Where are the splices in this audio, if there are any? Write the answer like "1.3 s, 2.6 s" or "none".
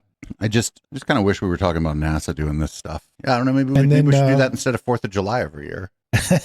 3.1 s